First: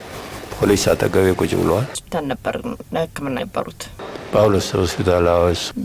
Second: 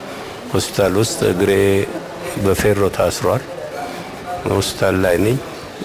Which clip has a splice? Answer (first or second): first